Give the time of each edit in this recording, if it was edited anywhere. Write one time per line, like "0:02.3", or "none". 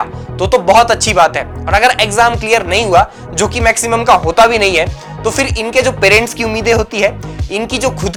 none

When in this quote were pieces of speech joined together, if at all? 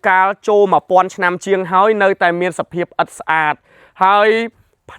none

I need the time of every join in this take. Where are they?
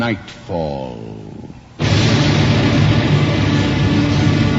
none

